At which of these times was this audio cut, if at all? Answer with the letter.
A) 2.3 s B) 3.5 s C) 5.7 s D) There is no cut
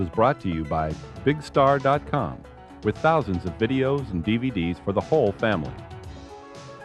C